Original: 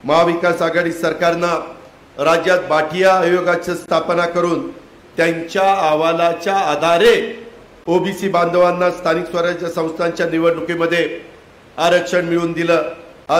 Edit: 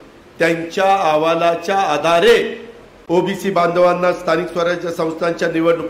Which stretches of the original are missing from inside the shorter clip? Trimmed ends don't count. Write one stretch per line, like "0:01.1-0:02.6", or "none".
none